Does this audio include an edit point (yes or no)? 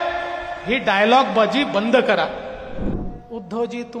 yes